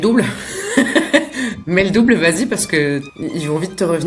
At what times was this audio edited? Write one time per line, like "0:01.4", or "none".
0:03.1